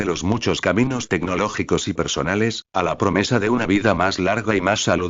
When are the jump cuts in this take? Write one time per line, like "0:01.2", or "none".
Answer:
0:02.8